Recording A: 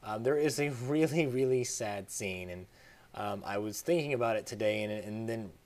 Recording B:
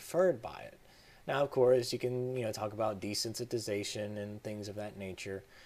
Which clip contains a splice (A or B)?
B